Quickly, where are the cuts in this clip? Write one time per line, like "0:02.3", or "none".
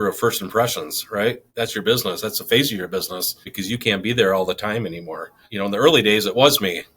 0:01.4
0:03.5
0:05.5